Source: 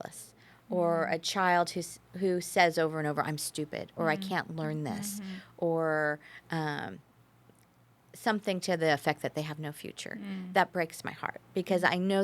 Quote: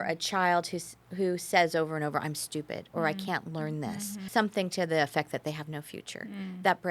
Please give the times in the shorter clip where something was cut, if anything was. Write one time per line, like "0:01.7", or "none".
0:04.2